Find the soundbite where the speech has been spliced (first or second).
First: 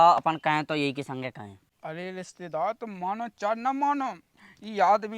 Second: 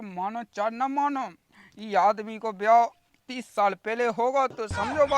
first